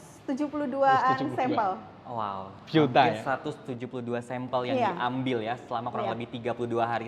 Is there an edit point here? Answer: no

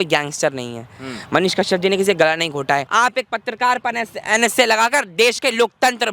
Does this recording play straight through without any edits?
no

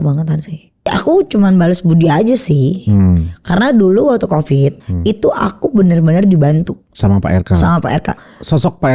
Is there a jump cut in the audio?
yes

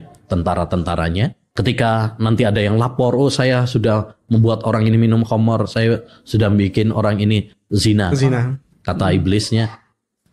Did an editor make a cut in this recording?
yes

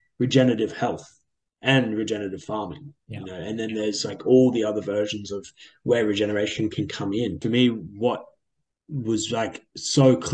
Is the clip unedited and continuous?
no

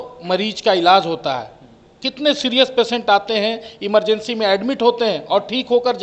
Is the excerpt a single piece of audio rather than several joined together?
yes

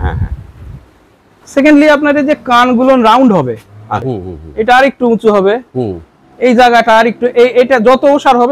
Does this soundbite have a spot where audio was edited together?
yes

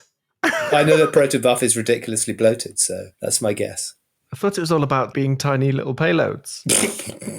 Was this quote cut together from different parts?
yes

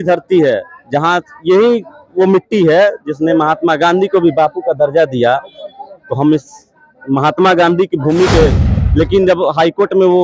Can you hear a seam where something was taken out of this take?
yes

